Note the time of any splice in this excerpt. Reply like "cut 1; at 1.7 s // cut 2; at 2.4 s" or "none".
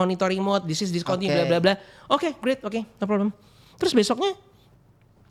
none